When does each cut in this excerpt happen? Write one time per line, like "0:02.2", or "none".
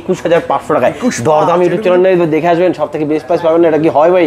none